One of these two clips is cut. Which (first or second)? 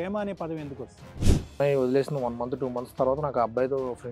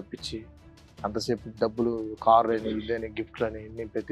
first